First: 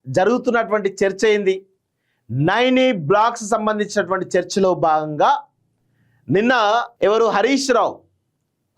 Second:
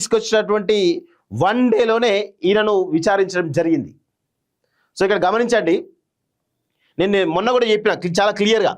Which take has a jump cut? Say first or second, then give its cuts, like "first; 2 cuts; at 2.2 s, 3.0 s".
first; 1 cut; at 6.9 s